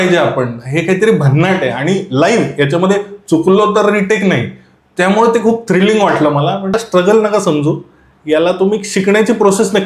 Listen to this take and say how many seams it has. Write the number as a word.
one